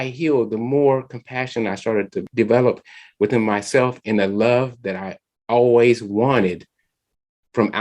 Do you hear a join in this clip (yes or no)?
yes